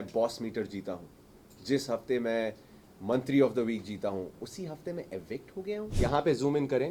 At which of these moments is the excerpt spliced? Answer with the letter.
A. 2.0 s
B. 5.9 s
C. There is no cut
B